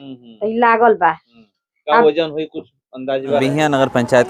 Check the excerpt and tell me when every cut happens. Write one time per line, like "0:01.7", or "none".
0:03.4

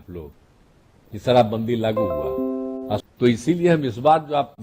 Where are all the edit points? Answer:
0:03.0

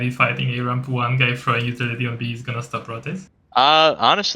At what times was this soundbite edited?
0:03.4

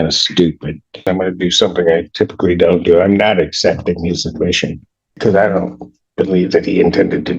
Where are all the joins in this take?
0:01.1
0:05.2

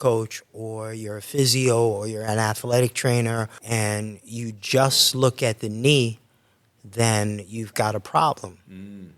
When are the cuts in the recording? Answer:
0:03.6

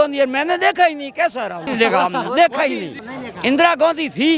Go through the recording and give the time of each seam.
0:01.7
0:03.1

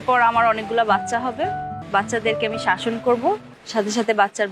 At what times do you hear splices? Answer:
0:01.8
0:03.6

